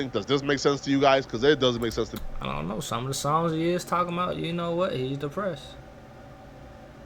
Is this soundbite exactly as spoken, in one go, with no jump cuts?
yes; 0 cuts

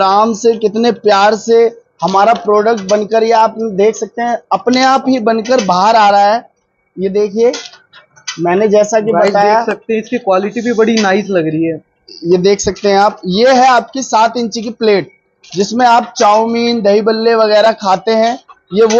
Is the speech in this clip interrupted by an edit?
no; 0 cuts

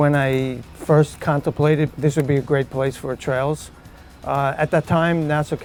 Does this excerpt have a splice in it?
no; 0 cuts

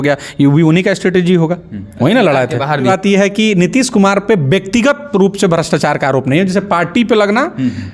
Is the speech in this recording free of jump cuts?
no; 1 cut; at 2.9 s

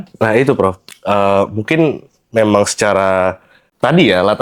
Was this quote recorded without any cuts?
yes; 0 cuts

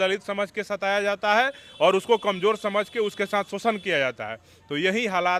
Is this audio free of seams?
yes; 0 cuts

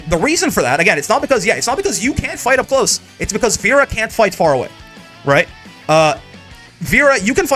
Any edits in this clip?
no; 0 cuts

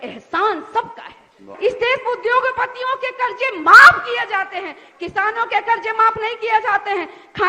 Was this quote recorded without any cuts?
no; 1 cut; at 1.5 s

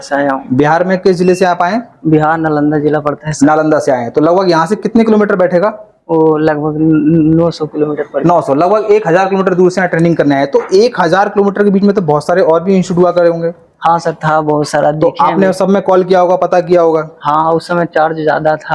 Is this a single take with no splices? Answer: yes; 0 cuts

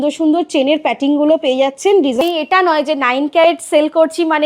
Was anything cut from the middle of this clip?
yes; 1 cut; at 2.2 s

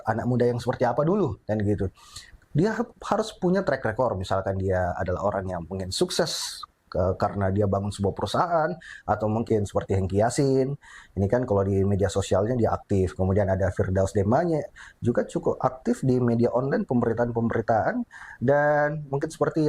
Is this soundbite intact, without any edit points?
no; 1 cut; at 9.4 s

